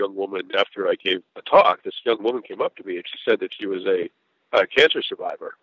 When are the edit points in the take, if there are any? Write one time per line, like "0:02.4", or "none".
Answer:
0:01.3